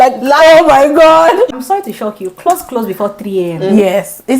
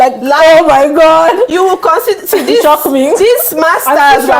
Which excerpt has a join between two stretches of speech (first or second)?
first